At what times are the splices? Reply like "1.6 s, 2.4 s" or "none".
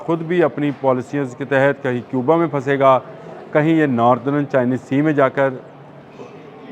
none